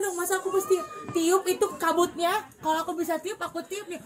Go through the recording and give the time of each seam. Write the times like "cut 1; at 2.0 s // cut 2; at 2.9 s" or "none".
none